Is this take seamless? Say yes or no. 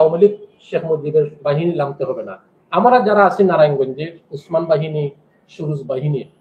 yes